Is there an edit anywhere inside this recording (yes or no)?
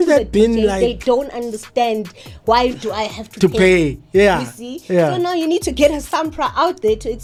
no